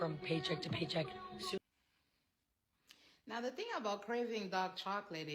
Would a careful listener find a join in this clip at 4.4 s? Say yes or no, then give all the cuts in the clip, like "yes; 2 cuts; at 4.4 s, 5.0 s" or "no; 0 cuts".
no; 1 cut; at 1.6 s